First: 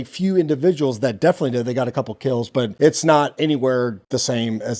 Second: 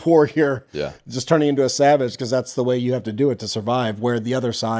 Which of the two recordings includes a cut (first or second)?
first